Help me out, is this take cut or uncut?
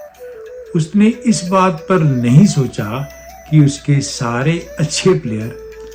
uncut